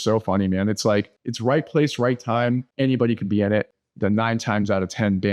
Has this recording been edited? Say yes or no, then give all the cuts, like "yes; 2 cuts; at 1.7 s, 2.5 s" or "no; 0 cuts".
yes; 3 cuts; at 1.2 s, 2.7 s, 3.8 s